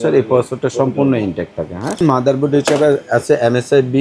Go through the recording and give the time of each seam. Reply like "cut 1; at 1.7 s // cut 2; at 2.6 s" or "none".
cut 1; at 2.0 s